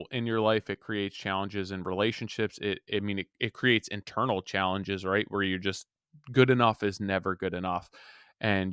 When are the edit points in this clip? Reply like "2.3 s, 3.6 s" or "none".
none